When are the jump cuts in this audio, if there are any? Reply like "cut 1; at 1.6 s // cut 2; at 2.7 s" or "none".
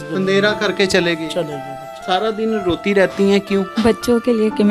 cut 1; at 2.0 s // cut 2; at 3.7 s

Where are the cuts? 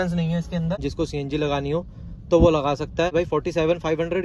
cut 1; at 0.9 s // cut 2; at 3.1 s

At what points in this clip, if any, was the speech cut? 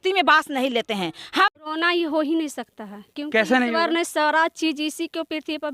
cut 1; at 1.5 s

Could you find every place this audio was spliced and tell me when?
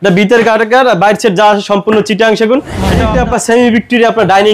cut 1; at 3.0 s

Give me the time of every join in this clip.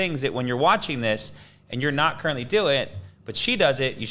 none

